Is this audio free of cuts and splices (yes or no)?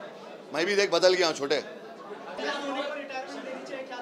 no